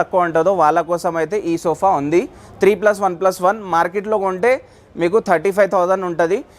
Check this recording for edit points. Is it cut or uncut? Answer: uncut